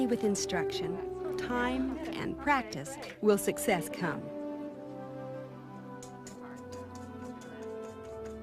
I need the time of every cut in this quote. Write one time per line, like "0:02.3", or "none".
0:05.8